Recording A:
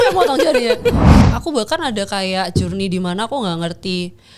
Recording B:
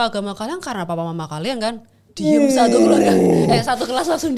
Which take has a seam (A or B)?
A